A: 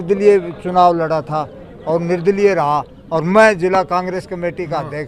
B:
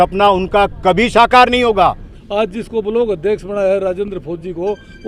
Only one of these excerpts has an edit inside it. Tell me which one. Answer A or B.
B